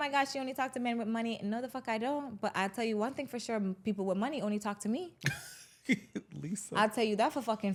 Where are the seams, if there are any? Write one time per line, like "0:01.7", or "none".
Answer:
none